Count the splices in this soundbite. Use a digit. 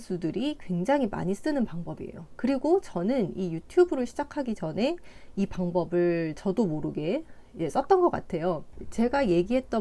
1